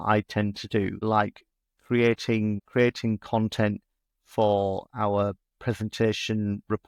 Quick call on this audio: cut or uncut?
uncut